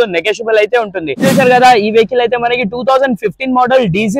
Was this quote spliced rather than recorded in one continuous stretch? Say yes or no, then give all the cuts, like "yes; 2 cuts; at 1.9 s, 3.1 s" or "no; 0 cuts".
yes; 1 cut; at 1.2 s